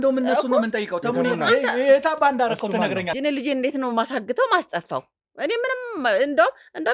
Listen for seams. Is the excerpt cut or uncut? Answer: cut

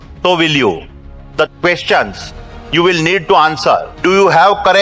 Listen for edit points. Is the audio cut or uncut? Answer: cut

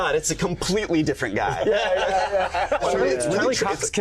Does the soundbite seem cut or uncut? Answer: cut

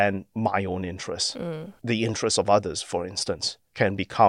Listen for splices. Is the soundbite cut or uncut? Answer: uncut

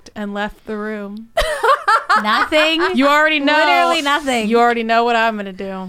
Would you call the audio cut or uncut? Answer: uncut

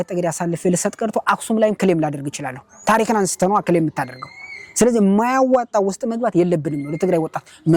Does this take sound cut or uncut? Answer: uncut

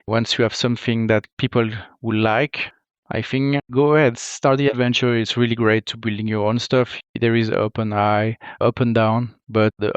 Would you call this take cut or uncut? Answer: cut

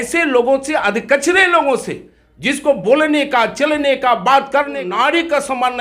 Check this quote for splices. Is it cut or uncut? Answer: cut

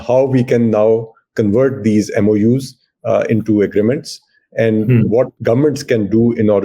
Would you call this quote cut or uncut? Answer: cut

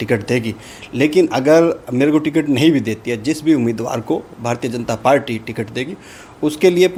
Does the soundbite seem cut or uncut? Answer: uncut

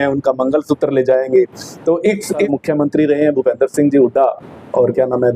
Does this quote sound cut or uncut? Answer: cut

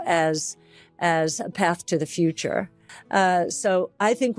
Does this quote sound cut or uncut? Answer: cut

